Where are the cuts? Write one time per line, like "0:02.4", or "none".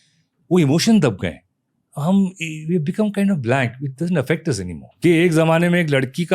0:04.8